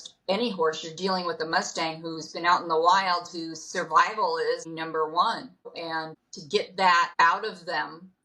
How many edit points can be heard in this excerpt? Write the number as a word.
two